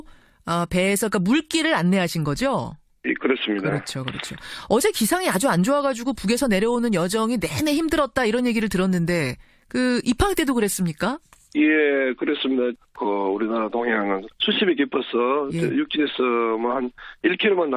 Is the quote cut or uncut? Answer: cut